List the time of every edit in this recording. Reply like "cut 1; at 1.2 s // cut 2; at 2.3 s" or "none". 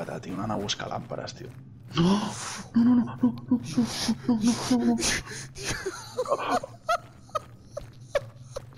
none